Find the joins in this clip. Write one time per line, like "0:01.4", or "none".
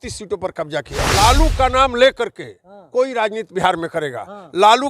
0:01.0